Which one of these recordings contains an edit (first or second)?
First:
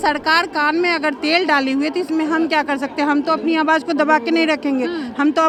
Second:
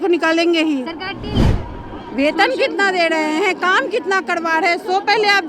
second